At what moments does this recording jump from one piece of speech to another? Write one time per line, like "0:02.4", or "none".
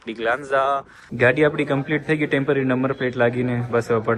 0:01.0